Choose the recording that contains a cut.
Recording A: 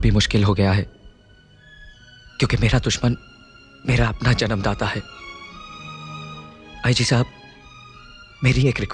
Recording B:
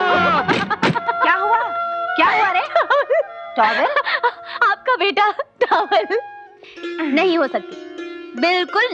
B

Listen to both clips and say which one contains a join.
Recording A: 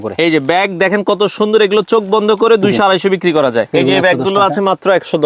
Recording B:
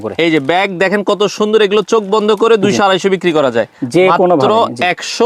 A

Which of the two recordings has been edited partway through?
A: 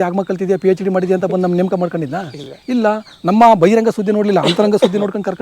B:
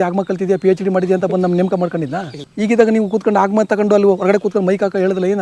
B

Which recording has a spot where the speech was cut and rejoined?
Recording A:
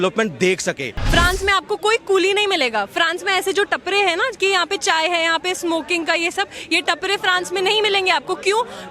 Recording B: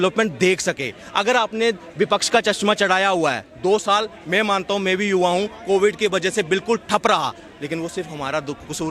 A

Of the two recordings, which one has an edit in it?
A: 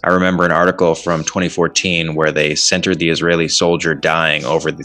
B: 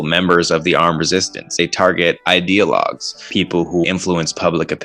B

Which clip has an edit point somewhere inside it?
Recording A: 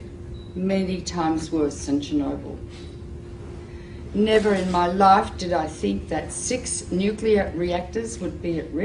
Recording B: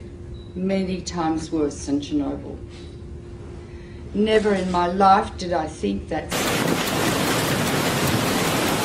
A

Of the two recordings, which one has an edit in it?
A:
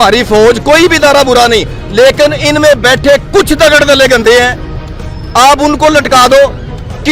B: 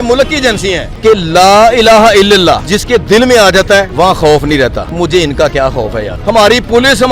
B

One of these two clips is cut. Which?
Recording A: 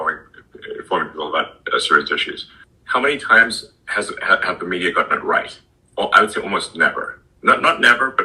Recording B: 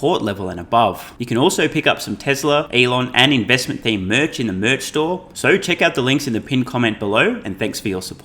B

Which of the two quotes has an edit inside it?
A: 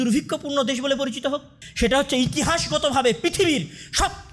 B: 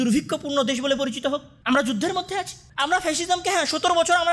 A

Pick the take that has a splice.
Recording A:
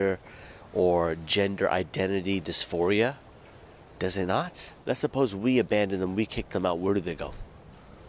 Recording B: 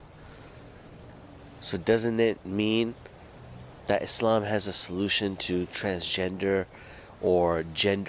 A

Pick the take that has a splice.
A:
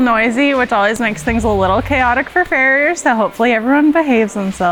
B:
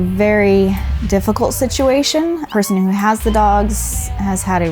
B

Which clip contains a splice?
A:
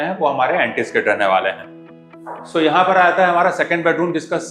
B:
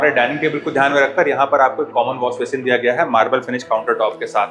A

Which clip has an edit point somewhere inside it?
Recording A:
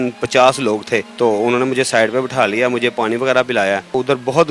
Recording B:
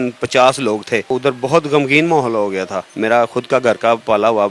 B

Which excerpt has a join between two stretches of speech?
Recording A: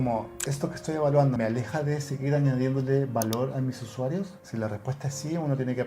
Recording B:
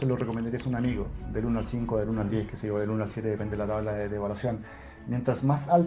A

